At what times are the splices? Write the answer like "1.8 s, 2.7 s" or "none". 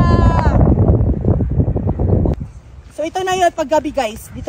2.1 s